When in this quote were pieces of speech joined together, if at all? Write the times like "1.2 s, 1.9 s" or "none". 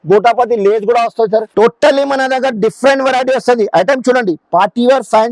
1.5 s